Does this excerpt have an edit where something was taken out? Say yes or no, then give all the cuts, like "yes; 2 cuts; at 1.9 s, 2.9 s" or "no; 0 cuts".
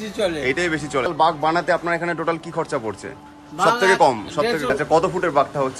yes; 2 cuts; at 1.1 s, 4.7 s